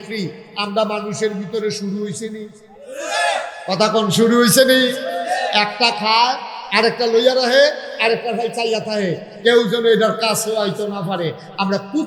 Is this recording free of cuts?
yes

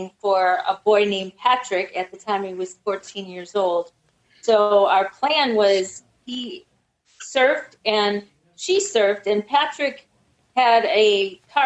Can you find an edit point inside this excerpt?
no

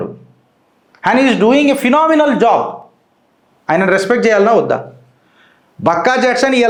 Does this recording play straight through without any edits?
yes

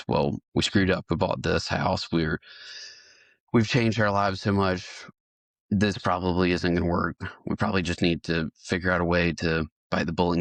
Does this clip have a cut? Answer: no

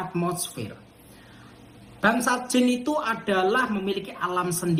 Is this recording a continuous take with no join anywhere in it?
yes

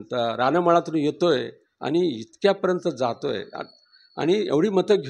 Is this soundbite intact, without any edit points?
yes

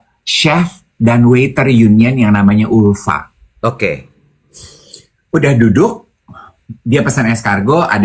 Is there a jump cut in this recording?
no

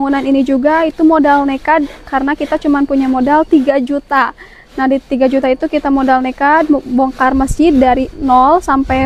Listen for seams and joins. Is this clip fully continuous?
yes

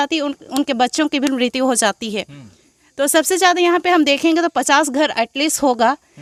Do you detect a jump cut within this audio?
no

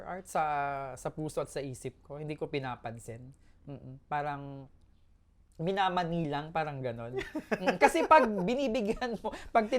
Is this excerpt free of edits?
yes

